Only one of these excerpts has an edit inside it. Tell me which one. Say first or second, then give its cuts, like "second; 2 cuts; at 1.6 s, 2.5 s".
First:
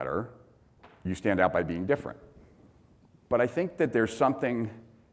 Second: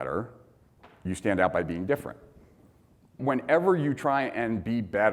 second; 1 cut; at 3.2 s